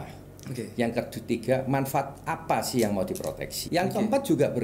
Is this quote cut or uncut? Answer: cut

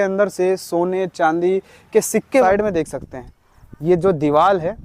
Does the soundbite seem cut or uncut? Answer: cut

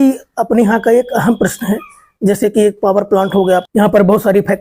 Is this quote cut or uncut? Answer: cut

